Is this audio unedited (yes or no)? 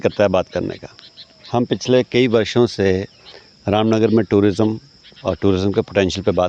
yes